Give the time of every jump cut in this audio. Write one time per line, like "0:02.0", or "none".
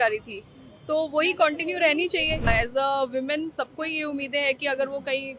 0:02.5